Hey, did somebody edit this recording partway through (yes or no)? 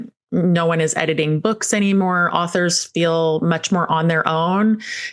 no